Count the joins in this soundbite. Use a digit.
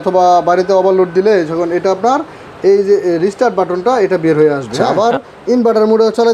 1